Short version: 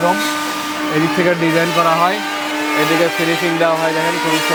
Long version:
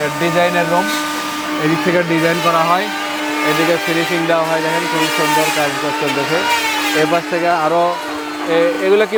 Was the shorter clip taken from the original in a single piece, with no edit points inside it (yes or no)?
yes